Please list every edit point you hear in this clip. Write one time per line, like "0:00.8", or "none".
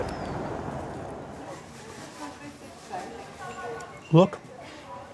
0:01.3